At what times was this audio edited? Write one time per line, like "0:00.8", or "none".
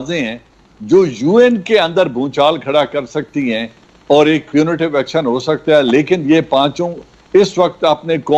none